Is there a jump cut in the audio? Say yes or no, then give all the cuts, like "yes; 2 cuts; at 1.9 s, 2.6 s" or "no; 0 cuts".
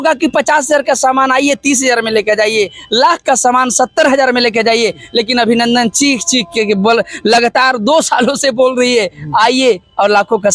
no; 0 cuts